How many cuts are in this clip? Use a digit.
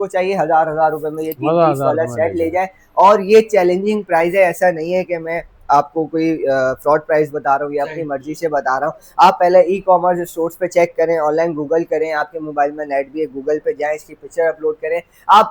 0